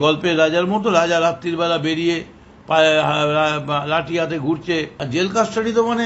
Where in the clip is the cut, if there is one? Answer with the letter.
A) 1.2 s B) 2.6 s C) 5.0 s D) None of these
C